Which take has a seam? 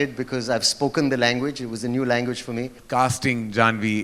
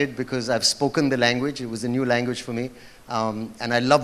first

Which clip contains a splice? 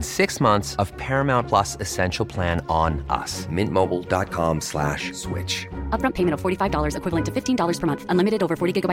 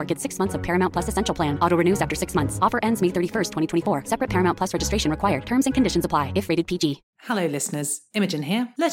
second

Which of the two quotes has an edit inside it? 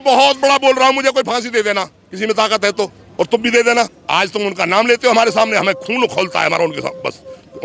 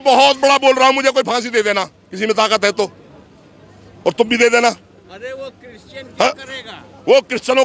first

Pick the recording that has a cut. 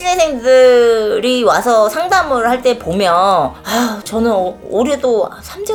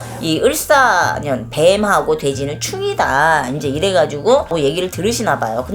second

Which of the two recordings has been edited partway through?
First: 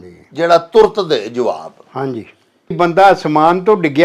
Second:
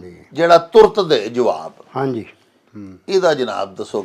first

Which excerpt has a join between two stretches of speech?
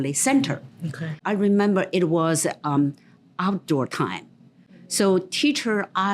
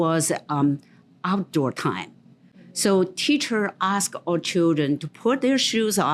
first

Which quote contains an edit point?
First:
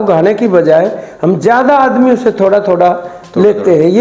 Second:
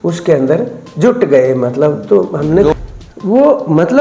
second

